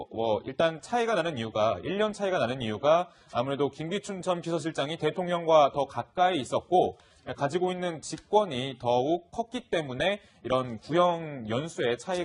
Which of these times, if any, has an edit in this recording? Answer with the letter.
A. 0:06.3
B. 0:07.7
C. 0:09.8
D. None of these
B